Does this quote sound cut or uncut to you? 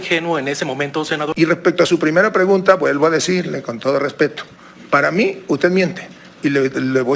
cut